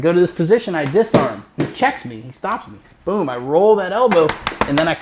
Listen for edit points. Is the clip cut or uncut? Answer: uncut